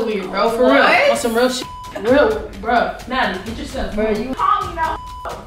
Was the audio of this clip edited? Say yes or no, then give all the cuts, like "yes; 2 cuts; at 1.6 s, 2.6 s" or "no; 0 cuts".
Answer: yes; 1 cut; at 4.3 s